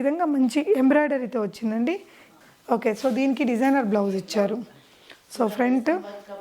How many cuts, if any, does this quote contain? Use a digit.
1